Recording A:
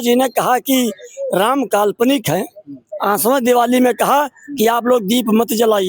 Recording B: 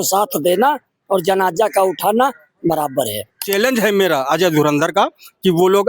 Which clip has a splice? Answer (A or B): B